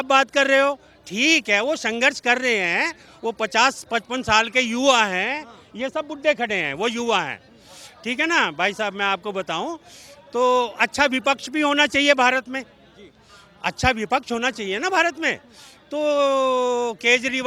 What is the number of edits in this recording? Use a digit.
0